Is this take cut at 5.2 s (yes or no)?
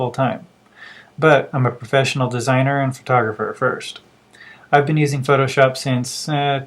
no